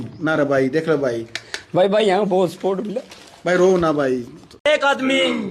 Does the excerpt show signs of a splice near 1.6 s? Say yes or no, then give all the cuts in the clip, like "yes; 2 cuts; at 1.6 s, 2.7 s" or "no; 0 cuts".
no; 1 cut; at 4.4 s